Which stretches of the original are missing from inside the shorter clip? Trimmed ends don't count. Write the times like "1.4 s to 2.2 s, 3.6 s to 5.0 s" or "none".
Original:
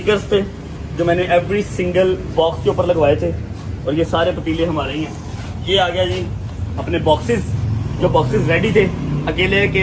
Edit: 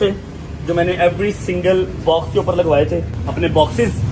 3.5 s to 6.7 s